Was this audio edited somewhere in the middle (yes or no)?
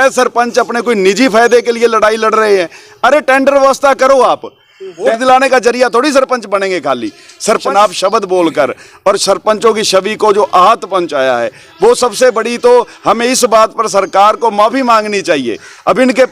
yes